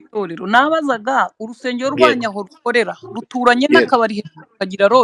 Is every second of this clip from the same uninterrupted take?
yes; 0 cuts

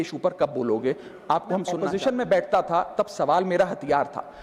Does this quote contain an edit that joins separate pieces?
yes; 1 cut; at 1.8 s

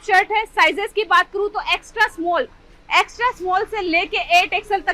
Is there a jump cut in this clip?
no; 0 cuts

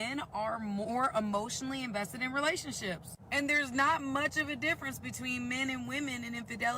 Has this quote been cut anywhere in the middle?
yes; 1 cut; at 3.1 s

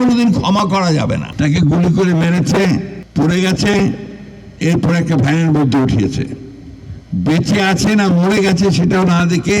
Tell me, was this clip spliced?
yes; 2 cuts; at 1.3 s, 3.0 s

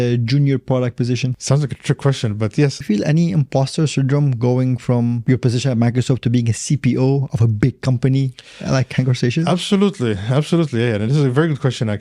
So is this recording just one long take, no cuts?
no; 3 cuts; at 1.4 s, 2.8 s, 5.2 s

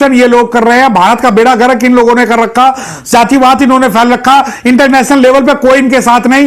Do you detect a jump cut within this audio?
no; 0 cuts

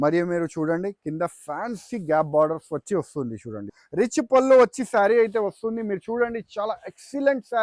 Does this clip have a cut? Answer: yes; 1 cut; at 3.8 s

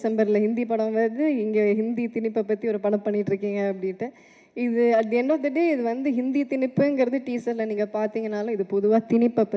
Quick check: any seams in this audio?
no; 0 cuts

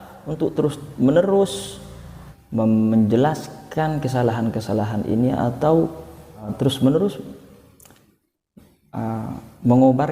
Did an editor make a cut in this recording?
yes; 1 cut; at 6.5 s

